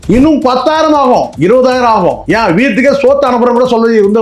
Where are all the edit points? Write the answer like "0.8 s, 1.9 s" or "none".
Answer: 1.3 s, 2.2 s